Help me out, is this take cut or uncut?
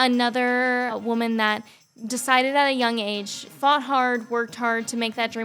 cut